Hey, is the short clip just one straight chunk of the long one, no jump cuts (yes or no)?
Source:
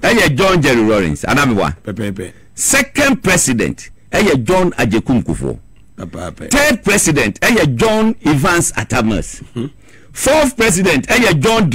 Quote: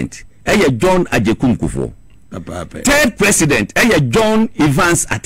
yes